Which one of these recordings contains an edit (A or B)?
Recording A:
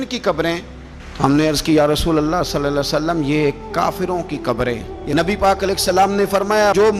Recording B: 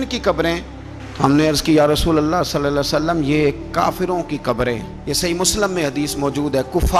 A